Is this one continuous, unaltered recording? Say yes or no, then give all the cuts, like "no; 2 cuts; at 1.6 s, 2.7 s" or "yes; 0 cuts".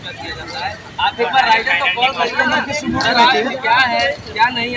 yes; 0 cuts